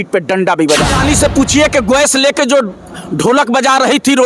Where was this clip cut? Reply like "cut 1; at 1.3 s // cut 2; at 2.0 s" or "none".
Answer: cut 1; at 0.9 s